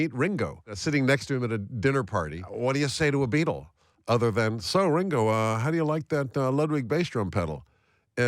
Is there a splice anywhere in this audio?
yes; 2 cuts; at 0.8 s, 2.4 s

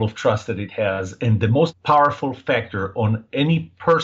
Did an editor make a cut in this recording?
yes; 1 cut; at 1.6 s

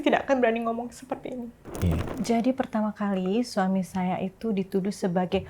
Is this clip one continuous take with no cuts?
no; 1 cut; at 2.1 s

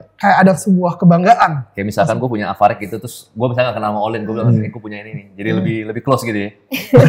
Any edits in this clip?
no; 0 cuts

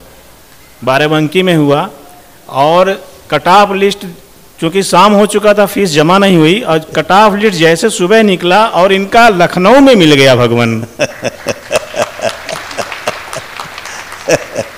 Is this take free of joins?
yes; 0 cuts

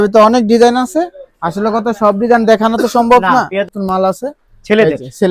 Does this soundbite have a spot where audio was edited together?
yes; 1 cut; at 3.7 s

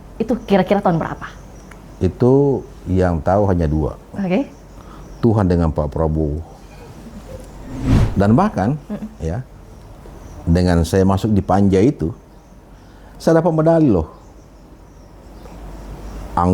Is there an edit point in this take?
yes; 1 cut; at 7.9 s

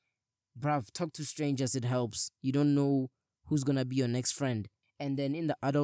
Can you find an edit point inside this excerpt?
yes; 1 cut; at 4.8 s

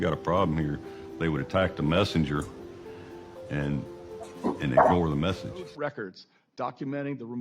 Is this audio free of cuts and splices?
no; 1 cut; at 5.7 s

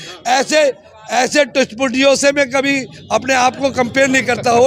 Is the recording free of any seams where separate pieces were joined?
yes; 0 cuts

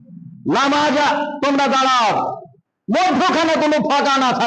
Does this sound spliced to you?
no; 0 cuts

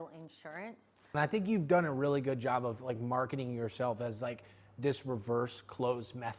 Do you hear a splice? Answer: yes; 1 cut; at 1.1 s

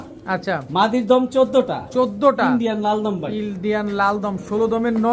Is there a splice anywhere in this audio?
no; 0 cuts

